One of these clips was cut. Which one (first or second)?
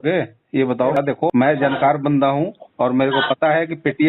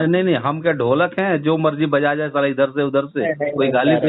first